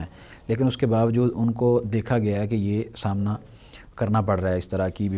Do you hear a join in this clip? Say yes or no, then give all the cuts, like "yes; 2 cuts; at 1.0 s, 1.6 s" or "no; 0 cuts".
no; 0 cuts